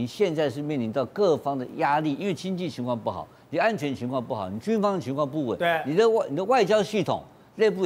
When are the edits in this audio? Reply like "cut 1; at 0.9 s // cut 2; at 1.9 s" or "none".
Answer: none